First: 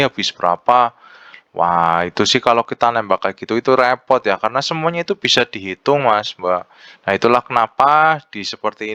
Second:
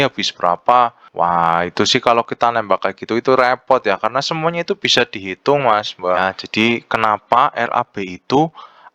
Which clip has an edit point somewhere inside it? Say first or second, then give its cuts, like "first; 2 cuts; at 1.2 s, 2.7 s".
second; 2 cuts; at 1.0 s, 6.2 s